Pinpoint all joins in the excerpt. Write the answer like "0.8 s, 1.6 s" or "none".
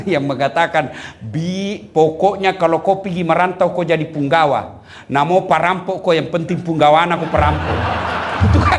none